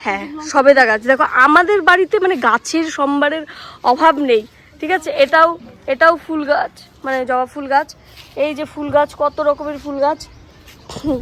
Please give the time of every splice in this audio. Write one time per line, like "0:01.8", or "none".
none